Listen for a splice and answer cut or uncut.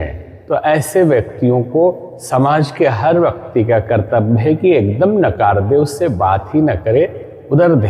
uncut